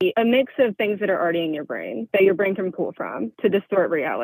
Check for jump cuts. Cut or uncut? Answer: cut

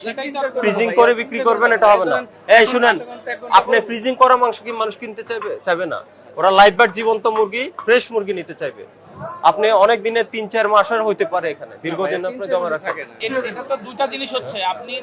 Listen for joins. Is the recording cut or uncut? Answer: cut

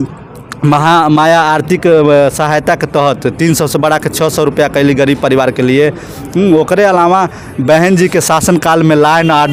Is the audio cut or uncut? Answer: uncut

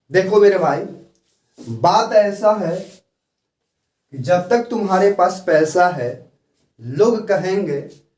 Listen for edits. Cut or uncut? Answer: uncut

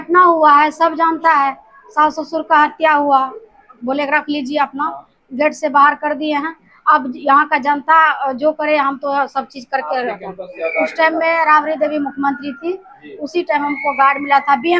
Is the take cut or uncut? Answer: cut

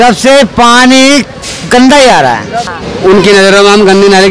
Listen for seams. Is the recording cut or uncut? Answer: cut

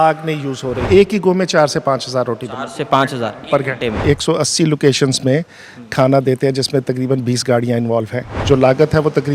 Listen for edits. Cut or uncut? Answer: cut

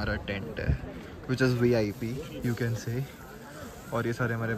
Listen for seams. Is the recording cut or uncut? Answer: uncut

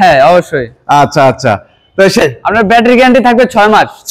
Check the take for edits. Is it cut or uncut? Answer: cut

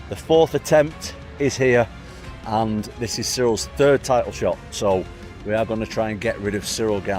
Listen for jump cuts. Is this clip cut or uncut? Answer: uncut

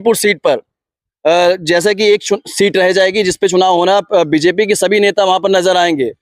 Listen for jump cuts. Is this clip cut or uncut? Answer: uncut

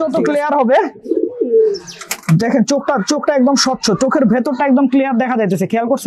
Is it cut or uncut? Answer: uncut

